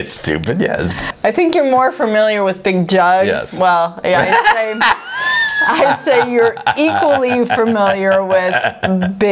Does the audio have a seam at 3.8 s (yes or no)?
no